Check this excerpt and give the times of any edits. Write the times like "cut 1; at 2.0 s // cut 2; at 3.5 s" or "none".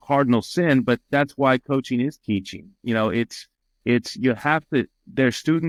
none